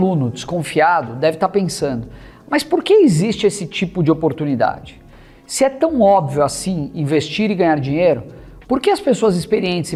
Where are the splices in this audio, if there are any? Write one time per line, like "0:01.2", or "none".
none